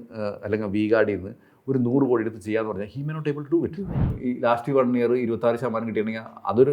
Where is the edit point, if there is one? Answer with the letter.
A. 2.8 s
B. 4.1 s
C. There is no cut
B